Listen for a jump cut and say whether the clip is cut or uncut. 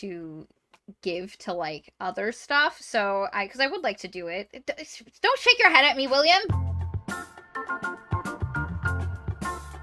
cut